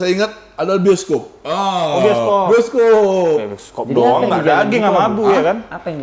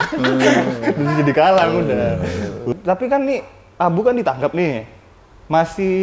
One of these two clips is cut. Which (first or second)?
second